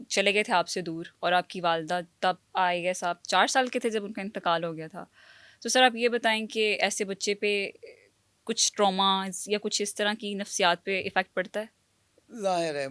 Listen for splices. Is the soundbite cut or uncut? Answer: uncut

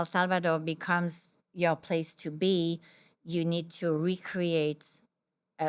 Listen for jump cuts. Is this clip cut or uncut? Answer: uncut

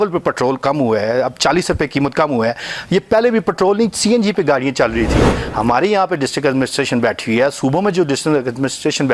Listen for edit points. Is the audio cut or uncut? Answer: uncut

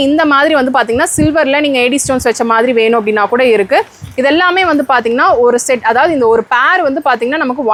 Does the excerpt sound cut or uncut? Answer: uncut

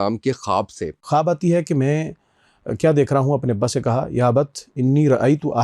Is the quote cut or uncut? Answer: cut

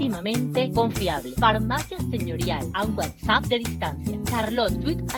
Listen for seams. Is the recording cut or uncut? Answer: uncut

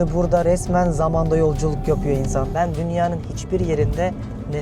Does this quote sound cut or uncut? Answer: cut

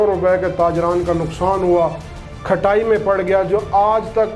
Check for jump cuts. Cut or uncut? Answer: uncut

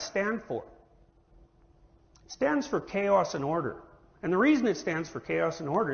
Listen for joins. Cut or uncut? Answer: uncut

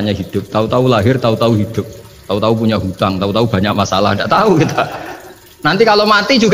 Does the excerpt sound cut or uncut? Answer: uncut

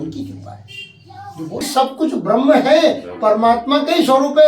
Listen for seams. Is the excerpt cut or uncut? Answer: cut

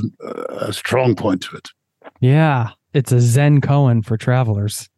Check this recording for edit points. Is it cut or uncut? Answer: cut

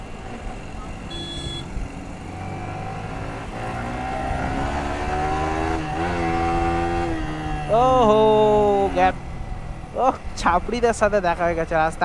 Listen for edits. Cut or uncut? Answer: cut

